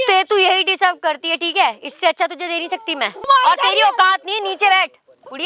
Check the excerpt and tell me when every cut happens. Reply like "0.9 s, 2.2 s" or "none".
3.3 s